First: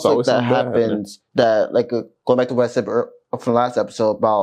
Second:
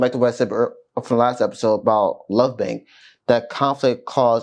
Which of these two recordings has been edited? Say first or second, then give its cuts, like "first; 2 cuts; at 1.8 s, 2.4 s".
first; 1 cut; at 1.1 s